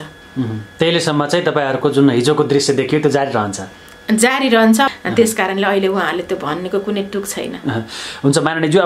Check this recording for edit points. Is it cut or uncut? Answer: uncut